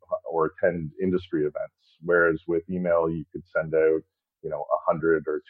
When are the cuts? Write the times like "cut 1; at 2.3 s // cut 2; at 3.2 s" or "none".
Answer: none